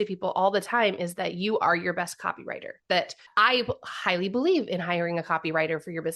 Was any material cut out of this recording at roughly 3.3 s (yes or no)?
yes